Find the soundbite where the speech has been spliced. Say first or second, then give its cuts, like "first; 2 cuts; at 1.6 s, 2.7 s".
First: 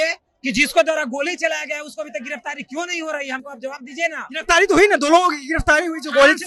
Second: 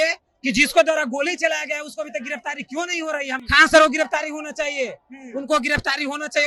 second; 1 cut; at 3.4 s